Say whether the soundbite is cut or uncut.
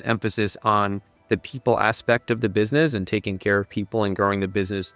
cut